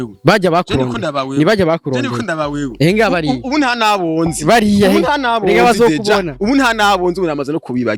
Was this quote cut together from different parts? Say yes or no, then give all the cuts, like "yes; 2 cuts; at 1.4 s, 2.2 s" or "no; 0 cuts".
no; 0 cuts